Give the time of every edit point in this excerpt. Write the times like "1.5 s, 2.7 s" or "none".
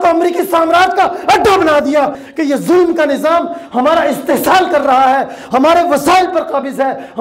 2.2 s